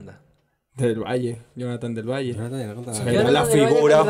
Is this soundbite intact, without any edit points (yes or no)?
yes